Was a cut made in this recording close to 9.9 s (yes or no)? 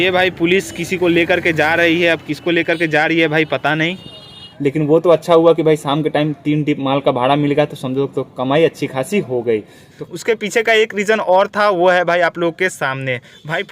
yes